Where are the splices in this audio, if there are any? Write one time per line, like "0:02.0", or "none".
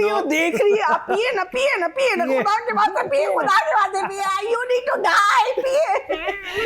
none